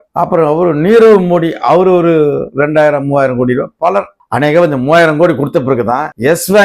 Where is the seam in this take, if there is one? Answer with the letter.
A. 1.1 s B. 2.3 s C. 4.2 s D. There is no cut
C